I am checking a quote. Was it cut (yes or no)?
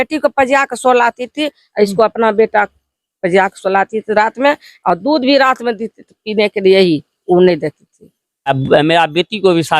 yes